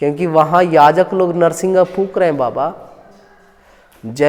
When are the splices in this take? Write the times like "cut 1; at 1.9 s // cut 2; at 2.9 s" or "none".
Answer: none